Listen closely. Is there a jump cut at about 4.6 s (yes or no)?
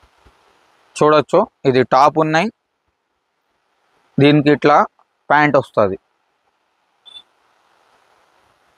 no